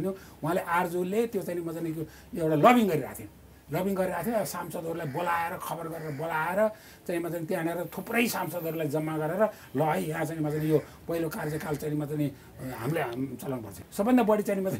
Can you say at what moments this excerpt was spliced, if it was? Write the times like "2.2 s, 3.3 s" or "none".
13.8 s